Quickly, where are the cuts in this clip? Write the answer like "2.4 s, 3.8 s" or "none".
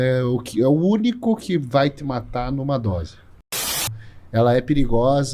3.8 s